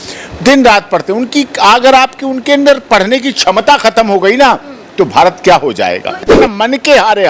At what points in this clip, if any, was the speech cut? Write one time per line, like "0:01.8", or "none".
0:06.3